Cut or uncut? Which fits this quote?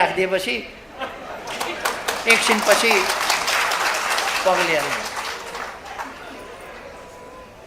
uncut